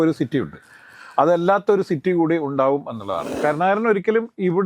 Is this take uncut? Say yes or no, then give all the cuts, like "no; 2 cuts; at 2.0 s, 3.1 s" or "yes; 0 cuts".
no; 1 cut; at 3.4 s